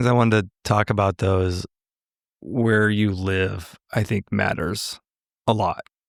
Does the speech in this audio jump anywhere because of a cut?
no; 0 cuts

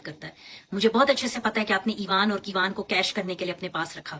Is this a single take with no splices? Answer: yes; 0 cuts

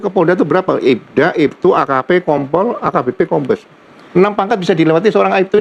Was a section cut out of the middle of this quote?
no; 0 cuts

